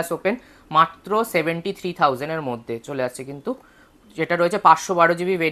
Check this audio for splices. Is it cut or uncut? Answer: uncut